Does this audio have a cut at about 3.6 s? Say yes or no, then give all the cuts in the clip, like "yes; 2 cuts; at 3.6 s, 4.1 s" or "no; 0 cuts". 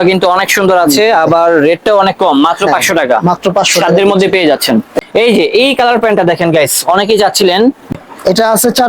no; 2 cuts; at 4.9 s, 7.9 s